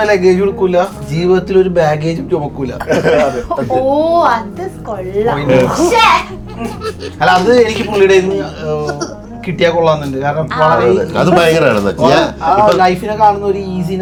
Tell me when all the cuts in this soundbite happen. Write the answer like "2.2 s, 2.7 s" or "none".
none